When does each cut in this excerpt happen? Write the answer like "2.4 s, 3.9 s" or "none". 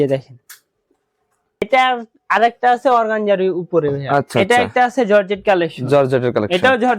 1.6 s